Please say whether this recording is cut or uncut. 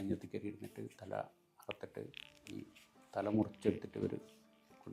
uncut